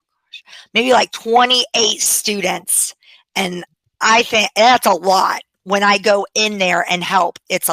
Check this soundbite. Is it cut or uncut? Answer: uncut